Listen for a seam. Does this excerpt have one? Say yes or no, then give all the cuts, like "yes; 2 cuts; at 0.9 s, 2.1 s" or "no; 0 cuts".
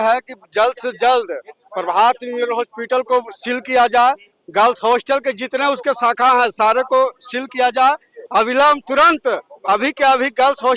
no; 0 cuts